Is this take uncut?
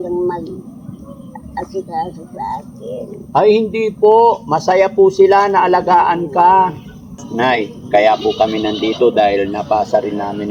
no; 1 cut; at 7.2 s

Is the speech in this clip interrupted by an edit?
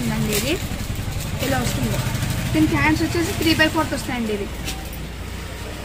no; 0 cuts

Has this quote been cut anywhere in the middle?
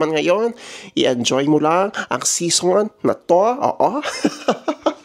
no; 0 cuts

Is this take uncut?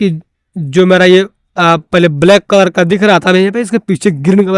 yes; 0 cuts

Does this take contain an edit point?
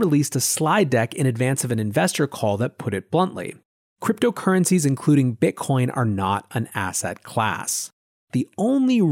yes; 1 cut; at 8.2 s

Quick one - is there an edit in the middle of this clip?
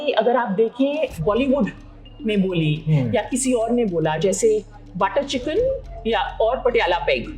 yes; 1 cut; at 1.2 s

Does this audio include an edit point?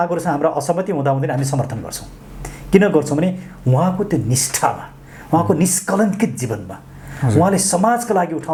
no; 0 cuts

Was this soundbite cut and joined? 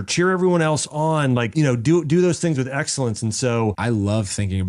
yes; 2 cuts; at 1.5 s, 3.8 s

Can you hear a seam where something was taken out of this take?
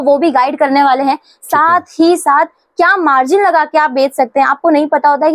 no; 0 cuts

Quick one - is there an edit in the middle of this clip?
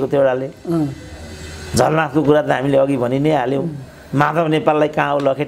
no; 0 cuts

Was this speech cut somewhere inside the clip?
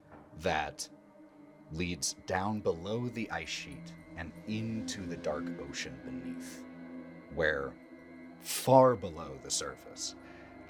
no; 0 cuts

